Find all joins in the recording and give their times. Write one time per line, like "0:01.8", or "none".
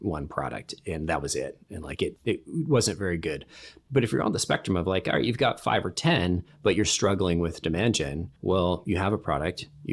0:02.2
0:08.2